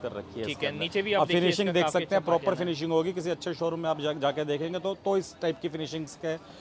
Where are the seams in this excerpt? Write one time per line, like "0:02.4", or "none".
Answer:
none

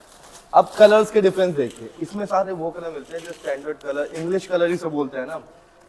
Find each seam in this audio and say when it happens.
none

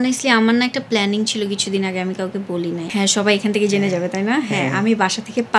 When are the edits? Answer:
0:02.8

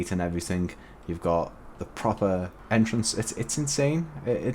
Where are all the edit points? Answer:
0:02.6

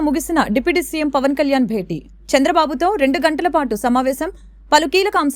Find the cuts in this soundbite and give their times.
none

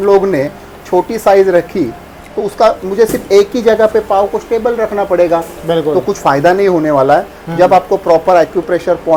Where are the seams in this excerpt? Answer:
none

